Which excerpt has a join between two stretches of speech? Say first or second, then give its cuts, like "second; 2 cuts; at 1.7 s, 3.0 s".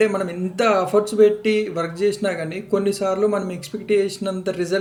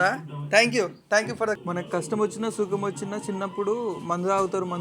second; 1 cut; at 1.6 s